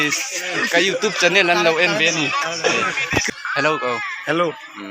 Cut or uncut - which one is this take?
cut